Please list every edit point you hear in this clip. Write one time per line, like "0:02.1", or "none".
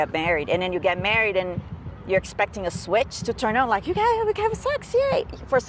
none